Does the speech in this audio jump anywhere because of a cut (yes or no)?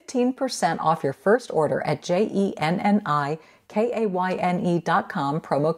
no